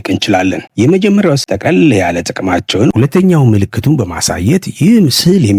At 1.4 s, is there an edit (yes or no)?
yes